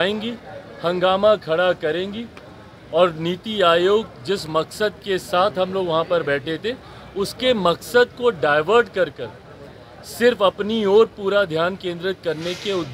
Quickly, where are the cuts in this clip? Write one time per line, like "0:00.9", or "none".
none